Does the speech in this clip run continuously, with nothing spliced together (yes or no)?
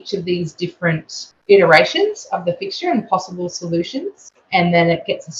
no